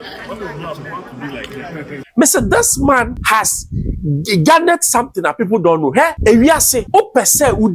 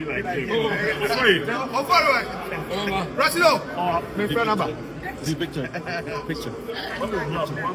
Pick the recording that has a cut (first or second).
first